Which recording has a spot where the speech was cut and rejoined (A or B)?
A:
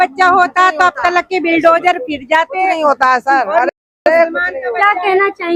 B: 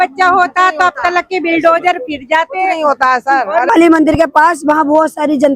B